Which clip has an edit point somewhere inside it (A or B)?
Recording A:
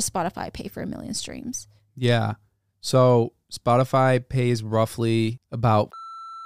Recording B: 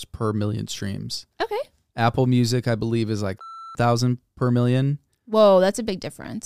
A